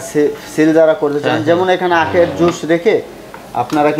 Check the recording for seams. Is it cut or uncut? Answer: uncut